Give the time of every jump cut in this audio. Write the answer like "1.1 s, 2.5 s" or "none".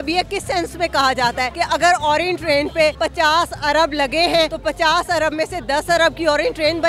1.5 s, 3.0 s, 4.6 s